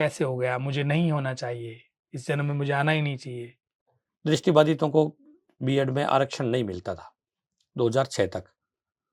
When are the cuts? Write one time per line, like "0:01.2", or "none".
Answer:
0:03.8